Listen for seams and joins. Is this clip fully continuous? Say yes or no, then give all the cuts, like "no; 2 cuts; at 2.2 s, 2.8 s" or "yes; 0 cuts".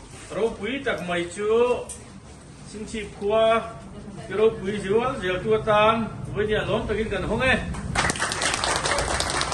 yes; 0 cuts